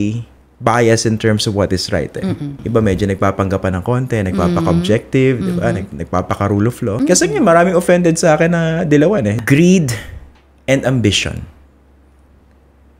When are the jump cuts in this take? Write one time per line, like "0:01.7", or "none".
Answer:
0:02.6
0:07.0
0:09.3